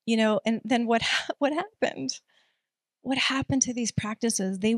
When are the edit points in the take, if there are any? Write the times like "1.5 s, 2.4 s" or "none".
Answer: none